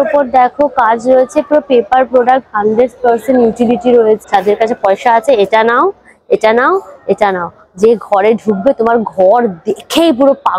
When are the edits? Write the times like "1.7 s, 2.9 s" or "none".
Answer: 4.2 s